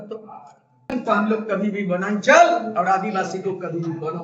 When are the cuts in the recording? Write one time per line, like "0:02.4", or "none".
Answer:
0:00.9